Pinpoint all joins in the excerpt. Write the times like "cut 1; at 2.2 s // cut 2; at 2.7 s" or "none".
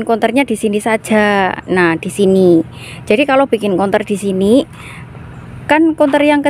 none